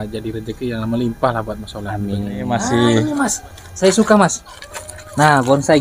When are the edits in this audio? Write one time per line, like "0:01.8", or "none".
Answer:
0:02.5